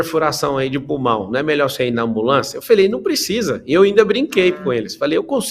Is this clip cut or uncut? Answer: uncut